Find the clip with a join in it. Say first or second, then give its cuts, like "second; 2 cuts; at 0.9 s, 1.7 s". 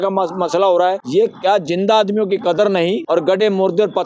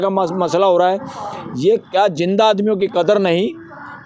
first; 2 cuts; at 1.0 s, 3.0 s